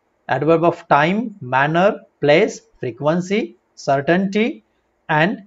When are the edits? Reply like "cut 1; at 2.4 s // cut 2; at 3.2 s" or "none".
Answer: none